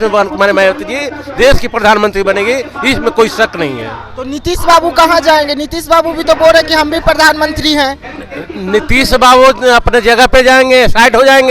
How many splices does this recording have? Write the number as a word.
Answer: zero